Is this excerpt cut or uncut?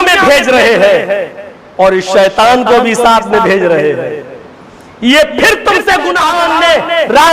cut